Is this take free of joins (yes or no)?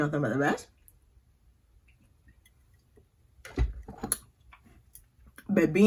yes